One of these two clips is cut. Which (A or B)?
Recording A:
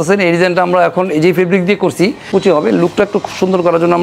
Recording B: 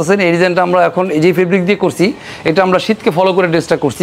A